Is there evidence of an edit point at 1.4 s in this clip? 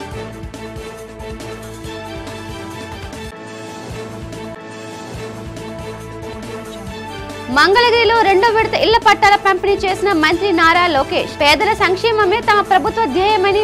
yes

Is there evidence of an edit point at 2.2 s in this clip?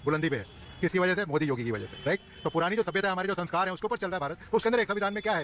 no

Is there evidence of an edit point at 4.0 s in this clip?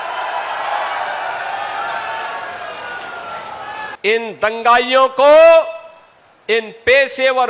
yes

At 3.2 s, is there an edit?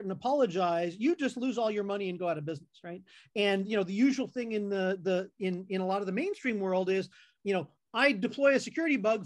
yes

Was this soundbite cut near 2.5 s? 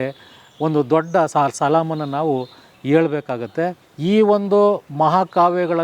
no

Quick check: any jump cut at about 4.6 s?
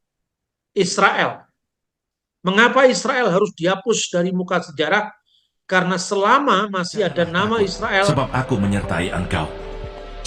no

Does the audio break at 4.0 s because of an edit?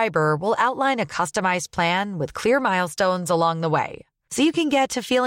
no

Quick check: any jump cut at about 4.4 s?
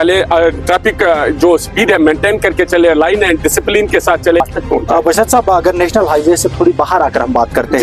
yes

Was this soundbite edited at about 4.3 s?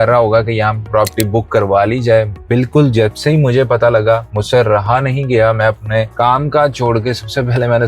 yes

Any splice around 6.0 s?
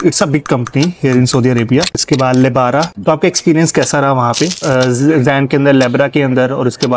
no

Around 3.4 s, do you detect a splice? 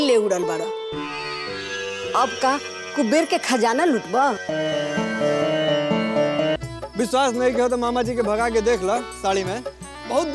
no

